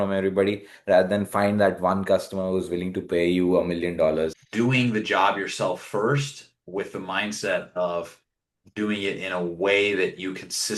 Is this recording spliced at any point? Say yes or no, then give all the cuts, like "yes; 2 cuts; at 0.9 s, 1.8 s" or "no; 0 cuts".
yes; 1 cut; at 4.4 s